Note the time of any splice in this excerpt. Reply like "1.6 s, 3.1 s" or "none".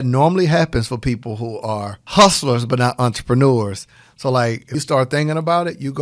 2.0 s, 4.7 s